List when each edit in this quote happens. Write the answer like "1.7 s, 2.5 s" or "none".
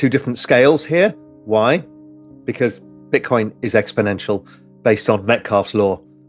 2.9 s